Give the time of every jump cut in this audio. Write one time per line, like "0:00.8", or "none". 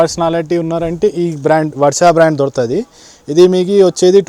none